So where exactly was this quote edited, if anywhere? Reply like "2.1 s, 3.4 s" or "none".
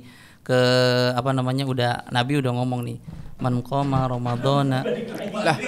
none